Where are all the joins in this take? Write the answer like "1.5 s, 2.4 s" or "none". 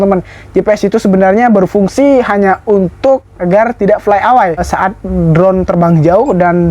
3.2 s